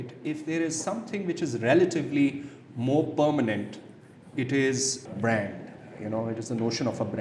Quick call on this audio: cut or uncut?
cut